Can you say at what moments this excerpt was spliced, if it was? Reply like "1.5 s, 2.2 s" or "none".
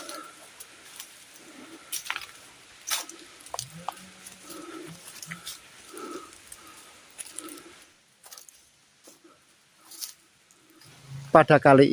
7.9 s, 10.9 s